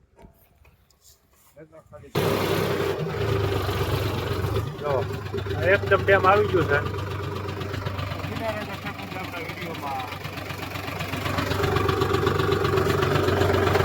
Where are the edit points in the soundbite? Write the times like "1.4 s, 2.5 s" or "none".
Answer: 2.1 s

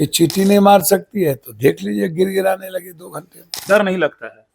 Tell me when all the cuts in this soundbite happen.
3.5 s

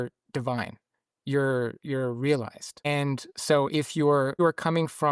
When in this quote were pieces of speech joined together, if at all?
2.9 s, 4.4 s

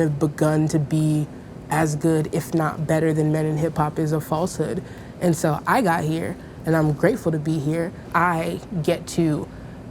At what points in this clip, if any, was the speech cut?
5.0 s, 8.1 s

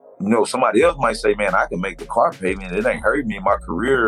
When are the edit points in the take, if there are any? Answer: none

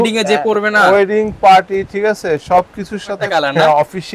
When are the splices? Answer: 3.2 s

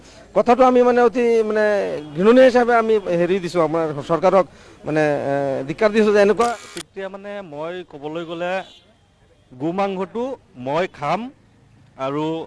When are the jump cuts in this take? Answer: 6.5 s

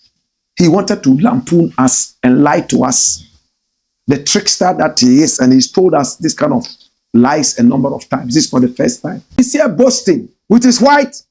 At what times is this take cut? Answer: 9.4 s, 10.3 s

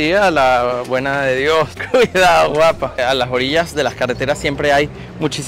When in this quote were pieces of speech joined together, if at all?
1.8 s, 3.0 s

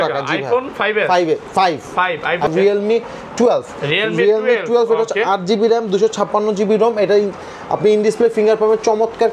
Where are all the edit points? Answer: 2.5 s

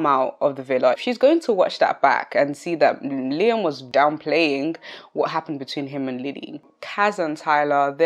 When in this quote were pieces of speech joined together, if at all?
1.0 s, 3.9 s, 6.6 s

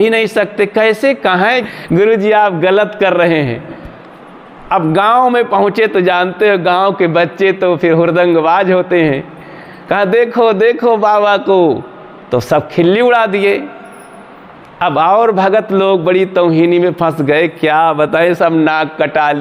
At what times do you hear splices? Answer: 1.6 s

